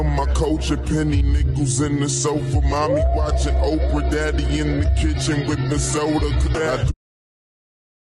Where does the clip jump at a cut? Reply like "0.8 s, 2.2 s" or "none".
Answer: 1.1 s